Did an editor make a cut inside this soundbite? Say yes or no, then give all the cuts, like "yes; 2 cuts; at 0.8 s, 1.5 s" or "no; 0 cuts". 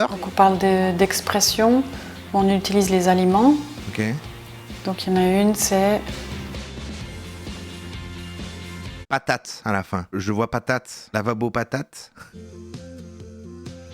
yes; 2 cuts; at 9.0 s, 12.2 s